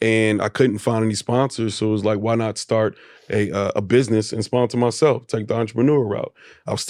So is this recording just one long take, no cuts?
yes; 0 cuts

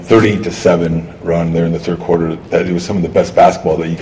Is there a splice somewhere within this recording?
no; 0 cuts

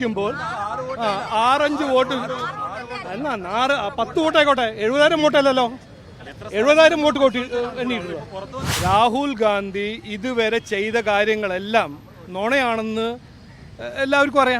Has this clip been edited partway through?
yes; 1 cut; at 8.6 s

